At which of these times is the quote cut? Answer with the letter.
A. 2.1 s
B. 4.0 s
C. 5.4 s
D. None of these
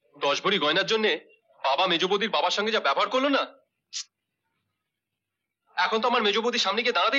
D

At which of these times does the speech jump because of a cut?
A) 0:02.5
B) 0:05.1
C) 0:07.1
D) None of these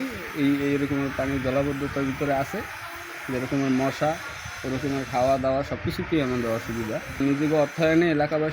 C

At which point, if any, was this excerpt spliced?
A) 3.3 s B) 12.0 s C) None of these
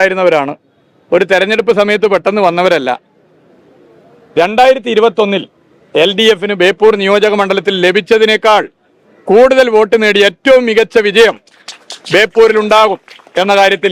C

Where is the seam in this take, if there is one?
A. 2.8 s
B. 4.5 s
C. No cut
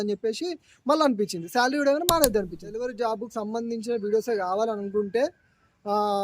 A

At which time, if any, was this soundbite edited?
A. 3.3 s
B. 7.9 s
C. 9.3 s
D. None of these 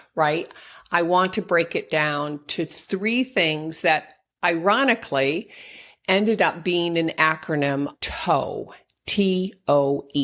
B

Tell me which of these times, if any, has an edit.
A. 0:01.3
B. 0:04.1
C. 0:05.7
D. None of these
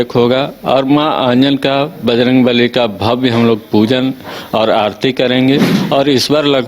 C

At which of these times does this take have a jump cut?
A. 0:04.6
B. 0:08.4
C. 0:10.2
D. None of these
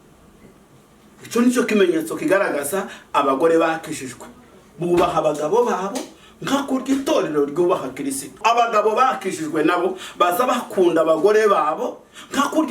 B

